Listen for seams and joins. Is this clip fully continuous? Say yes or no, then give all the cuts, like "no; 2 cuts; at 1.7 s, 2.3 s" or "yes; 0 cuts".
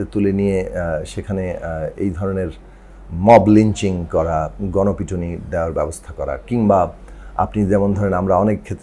yes; 0 cuts